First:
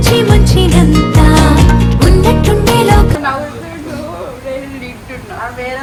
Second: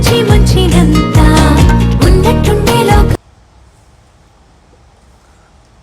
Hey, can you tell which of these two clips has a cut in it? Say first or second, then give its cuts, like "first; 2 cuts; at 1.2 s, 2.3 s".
second; 1 cut; at 3.2 s